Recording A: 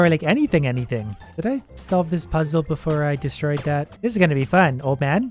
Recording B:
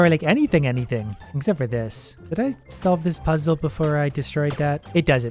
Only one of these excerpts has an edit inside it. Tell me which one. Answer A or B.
A